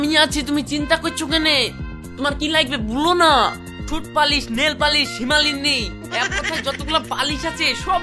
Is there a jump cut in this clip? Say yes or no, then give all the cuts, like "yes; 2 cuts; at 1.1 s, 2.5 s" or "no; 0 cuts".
no; 0 cuts